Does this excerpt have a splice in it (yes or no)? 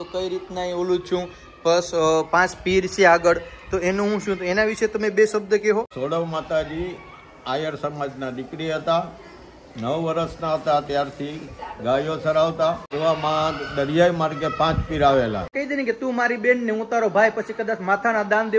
yes